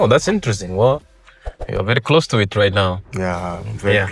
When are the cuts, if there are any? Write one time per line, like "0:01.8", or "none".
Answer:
none